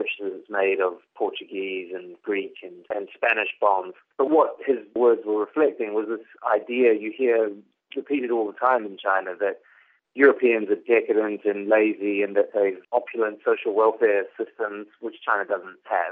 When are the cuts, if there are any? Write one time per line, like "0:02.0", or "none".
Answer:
0:02.9